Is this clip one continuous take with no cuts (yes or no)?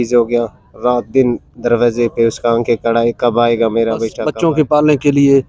no